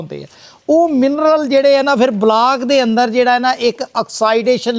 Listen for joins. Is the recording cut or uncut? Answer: uncut